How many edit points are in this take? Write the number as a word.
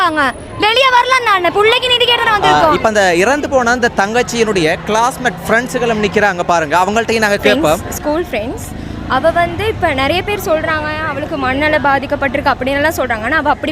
two